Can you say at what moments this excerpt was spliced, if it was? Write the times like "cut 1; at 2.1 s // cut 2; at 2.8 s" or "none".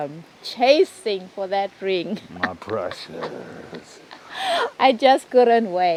none